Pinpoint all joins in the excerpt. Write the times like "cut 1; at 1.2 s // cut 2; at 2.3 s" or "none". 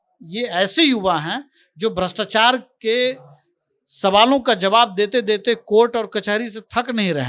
none